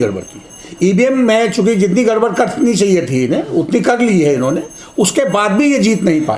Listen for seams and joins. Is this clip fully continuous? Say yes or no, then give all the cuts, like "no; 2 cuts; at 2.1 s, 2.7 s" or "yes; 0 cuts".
yes; 0 cuts